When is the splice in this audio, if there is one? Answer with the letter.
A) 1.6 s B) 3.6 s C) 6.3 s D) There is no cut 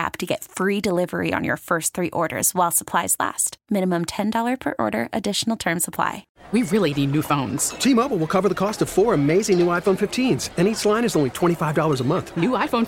C